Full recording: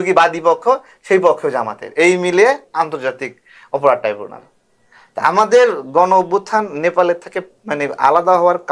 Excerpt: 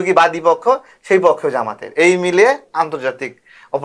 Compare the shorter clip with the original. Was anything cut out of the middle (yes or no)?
no